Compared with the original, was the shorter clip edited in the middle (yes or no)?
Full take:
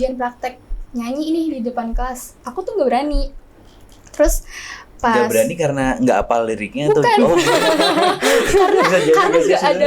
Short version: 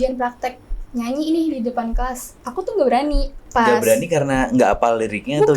yes